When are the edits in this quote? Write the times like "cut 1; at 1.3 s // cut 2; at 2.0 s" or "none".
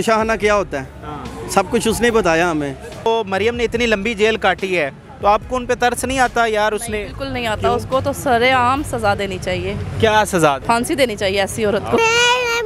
cut 1; at 3.1 s // cut 2; at 10.6 s // cut 3; at 12.0 s